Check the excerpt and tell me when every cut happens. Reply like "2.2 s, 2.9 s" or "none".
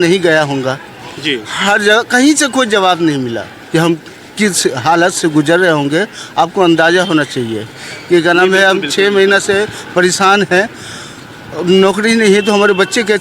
3.5 s